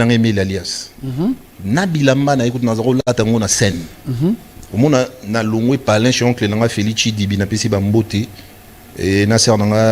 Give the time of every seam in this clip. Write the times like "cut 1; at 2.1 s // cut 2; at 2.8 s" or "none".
none